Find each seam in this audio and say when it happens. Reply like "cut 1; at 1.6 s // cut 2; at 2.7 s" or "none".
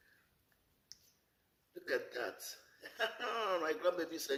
none